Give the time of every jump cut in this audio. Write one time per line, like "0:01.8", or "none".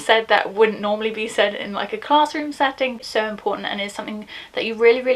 0:03.1